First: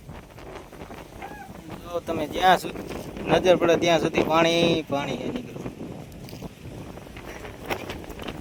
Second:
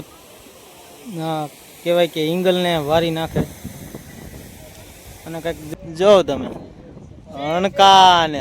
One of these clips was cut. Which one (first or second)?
second